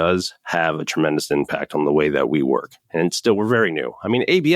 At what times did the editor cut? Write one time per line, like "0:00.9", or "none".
none